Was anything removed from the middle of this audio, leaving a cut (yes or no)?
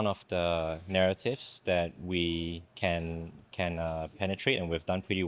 no